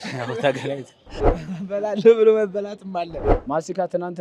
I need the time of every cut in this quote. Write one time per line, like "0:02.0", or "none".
0:03.2